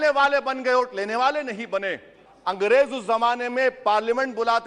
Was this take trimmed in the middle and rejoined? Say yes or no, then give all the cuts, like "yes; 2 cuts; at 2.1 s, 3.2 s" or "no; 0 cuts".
yes; 1 cut; at 2.2 s